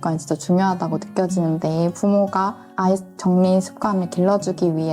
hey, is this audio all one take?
yes; 0 cuts

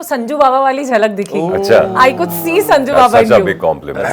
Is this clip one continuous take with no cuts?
yes; 0 cuts

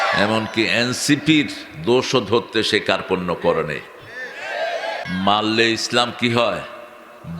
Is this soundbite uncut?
no; 1 cut; at 5.0 s

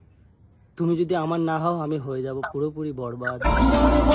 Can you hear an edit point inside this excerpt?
no; 0 cuts

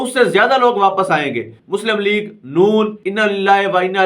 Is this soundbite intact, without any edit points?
no; 2 cuts; at 1.6 s, 3.0 s

